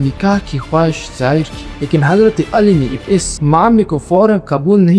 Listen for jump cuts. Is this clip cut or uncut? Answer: cut